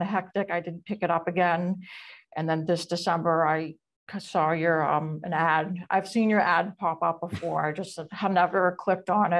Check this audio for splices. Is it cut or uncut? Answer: uncut